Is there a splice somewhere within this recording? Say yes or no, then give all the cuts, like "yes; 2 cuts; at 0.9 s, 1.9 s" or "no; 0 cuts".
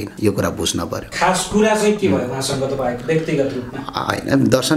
no; 0 cuts